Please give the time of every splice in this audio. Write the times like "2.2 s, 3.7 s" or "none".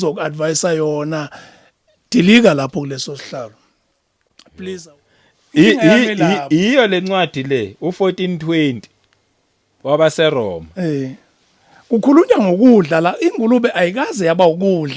4.8 s